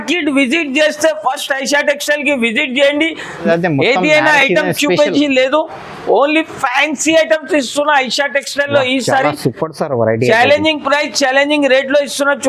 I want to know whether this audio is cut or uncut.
cut